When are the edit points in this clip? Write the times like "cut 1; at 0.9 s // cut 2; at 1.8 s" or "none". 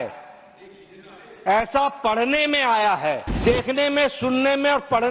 cut 1; at 3.4 s